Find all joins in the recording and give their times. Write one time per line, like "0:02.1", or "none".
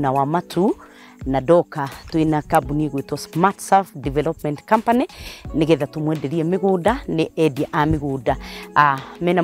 none